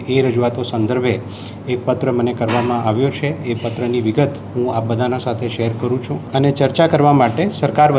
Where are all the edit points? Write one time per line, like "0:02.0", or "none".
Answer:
0:06.2